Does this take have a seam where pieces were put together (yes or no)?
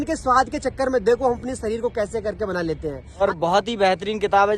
yes